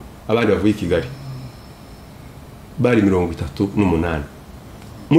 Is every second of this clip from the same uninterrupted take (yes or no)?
yes